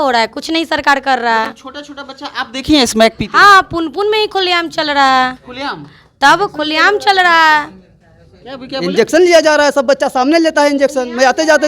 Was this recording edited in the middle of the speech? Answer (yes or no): no